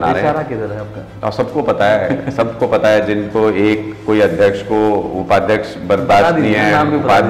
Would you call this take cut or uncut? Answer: uncut